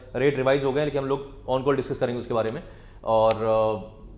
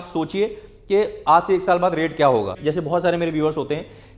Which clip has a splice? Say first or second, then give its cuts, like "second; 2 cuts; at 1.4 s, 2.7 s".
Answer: second; 1 cut; at 2.6 s